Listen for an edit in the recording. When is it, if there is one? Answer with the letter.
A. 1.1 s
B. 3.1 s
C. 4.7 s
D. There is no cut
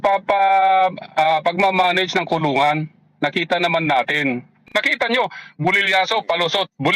C